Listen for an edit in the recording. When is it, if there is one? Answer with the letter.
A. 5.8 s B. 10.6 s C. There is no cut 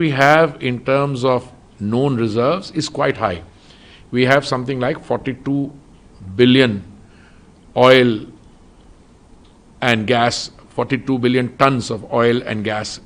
C